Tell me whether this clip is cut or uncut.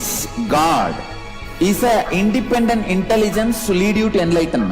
cut